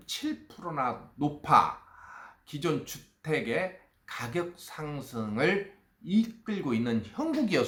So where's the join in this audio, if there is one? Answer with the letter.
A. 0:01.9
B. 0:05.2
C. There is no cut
C